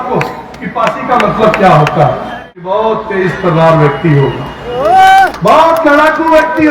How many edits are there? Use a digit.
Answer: 1